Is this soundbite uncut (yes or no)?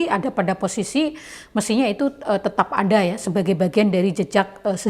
yes